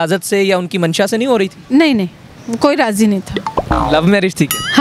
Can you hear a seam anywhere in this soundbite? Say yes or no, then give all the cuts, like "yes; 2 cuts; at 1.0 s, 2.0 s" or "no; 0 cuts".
no; 0 cuts